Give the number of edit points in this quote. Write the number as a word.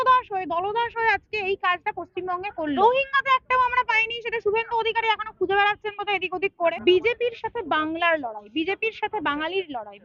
two